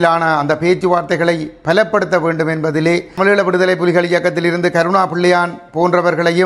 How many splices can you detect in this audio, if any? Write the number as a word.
one